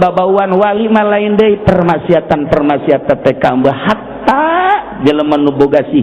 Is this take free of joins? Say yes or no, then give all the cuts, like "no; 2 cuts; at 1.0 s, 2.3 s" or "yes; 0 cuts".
yes; 0 cuts